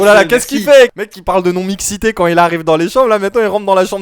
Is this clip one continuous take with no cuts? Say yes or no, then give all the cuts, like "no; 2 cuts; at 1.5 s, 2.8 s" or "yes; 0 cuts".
no; 1 cut; at 1.0 s